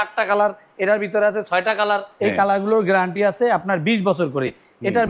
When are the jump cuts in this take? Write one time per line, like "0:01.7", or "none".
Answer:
0:02.1